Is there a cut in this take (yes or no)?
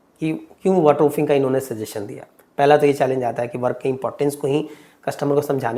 no